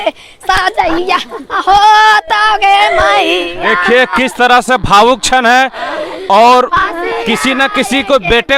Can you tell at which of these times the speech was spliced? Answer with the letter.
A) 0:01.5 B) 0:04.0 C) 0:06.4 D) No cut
D